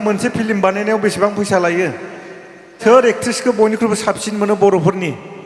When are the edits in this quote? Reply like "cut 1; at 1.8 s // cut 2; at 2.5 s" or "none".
cut 1; at 2.8 s